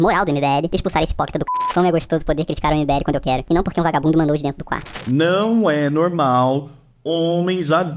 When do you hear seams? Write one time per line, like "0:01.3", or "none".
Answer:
0:01.7
0:04.9